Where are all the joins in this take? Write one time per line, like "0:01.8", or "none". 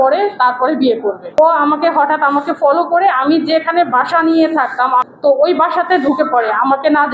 0:01.4
0:05.0

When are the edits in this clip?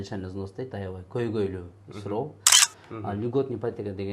0:02.5

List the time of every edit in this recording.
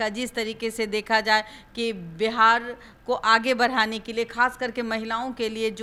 none

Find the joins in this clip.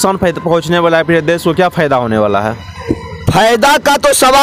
none

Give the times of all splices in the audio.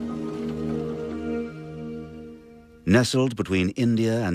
0:02.1

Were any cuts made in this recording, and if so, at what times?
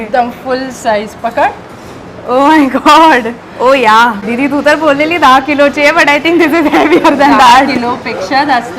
0:04.2

